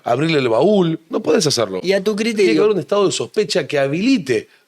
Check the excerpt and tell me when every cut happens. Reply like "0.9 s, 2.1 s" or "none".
none